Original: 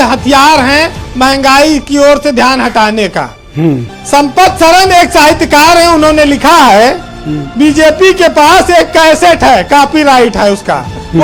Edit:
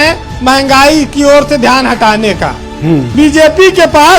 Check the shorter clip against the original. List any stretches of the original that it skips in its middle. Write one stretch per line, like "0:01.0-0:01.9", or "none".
0:03.8-0:07.5